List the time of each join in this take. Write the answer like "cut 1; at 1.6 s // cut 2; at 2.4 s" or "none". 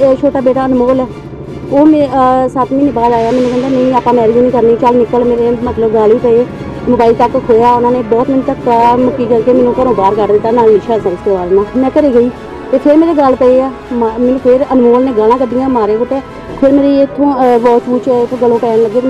cut 1; at 11.1 s